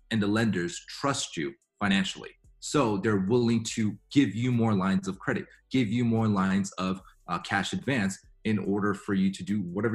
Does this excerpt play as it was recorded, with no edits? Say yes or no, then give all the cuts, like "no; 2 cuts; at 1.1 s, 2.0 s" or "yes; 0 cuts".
yes; 0 cuts